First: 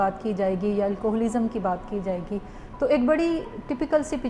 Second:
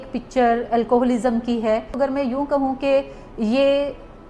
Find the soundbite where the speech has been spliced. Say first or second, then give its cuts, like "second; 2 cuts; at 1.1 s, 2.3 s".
second; 1 cut; at 2.0 s